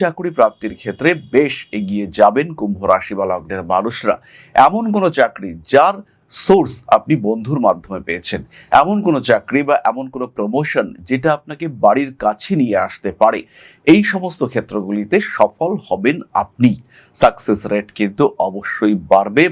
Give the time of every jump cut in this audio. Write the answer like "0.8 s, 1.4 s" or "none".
none